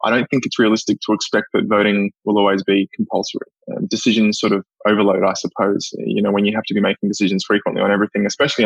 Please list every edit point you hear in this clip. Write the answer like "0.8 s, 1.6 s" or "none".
none